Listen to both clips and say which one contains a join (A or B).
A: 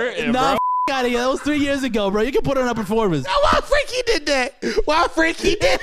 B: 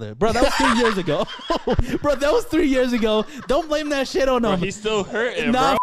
A